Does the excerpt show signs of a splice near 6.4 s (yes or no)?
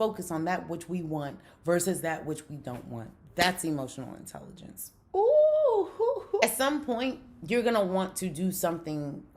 yes